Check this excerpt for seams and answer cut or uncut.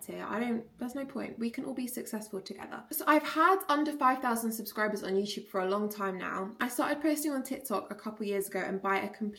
uncut